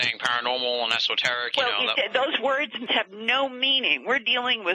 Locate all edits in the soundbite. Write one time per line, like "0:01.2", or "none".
0:02.9